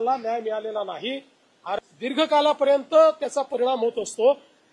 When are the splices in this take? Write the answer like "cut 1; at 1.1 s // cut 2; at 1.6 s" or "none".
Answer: cut 1; at 1.8 s